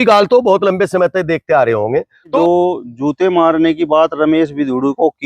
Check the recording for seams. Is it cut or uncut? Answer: cut